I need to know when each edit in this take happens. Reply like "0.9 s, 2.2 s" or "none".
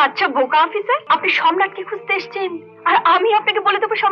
1.0 s